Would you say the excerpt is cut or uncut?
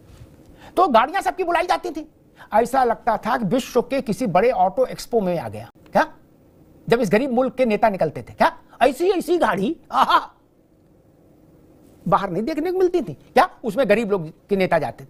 uncut